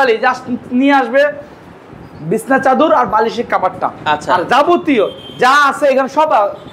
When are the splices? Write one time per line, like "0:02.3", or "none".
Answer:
none